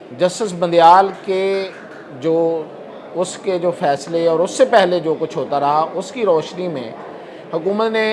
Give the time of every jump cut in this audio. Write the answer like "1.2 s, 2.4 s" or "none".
none